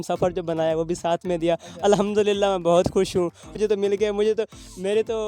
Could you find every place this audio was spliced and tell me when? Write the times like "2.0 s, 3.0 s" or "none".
3.5 s